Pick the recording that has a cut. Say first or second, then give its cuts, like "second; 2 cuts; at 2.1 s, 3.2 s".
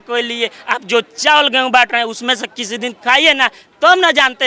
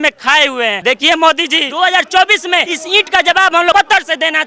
second; 4 cuts; at 0.8 s, 1.6 s, 2.8 s, 3.7 s